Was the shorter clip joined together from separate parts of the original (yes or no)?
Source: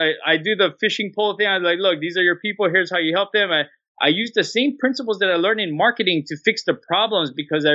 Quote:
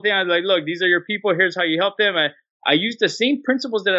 no